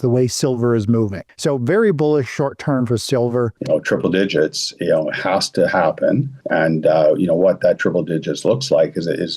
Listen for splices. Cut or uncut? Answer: cut